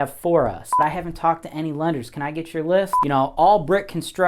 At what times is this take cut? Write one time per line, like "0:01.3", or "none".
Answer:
0:00.8
0:03.0